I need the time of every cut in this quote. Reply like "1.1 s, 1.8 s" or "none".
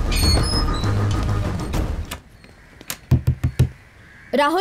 2.0 s

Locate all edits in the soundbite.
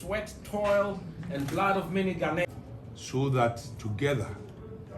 2.5 s

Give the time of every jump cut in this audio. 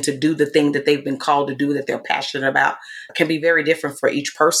none

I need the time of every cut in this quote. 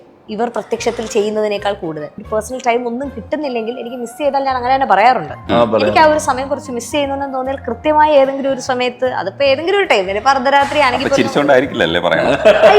2.1 s

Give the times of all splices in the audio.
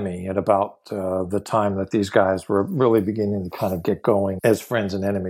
4.4 s

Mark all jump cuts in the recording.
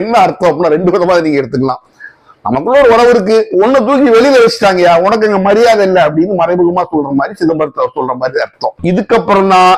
8.7 s

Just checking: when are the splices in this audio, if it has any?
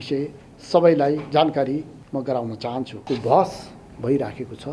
2.0 s, 3.0 s

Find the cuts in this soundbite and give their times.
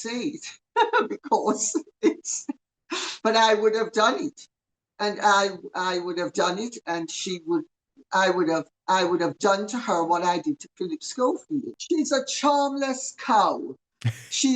11.8 s

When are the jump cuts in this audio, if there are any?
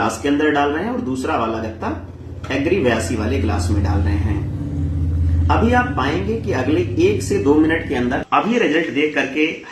8.2 s

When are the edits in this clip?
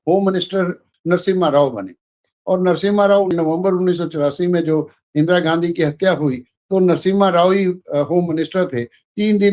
0.9 s, 3.3 s

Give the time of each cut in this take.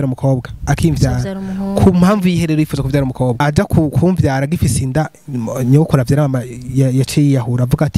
3.4 s

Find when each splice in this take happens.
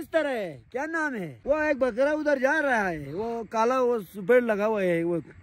1.3 s

